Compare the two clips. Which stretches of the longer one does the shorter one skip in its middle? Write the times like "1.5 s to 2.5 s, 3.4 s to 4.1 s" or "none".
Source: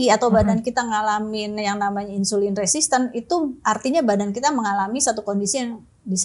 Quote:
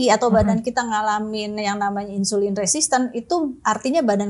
none